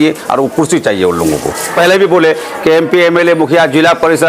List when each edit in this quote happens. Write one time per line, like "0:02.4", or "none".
0:01.7